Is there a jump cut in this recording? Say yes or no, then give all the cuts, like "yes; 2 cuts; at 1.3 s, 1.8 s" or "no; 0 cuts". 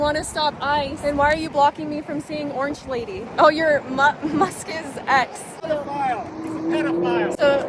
yes; 3 cuts; at 0.9 s, 3.2 s, 5.5 s